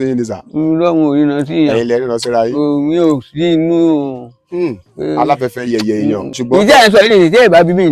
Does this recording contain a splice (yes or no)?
yes